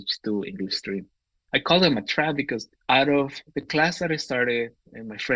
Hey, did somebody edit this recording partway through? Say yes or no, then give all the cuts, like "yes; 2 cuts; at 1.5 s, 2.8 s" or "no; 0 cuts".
no; 0 cuts